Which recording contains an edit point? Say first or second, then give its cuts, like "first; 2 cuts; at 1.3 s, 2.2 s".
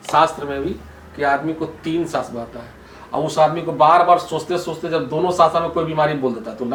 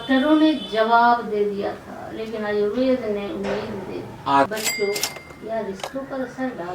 second; 1 cut; at 4.5 s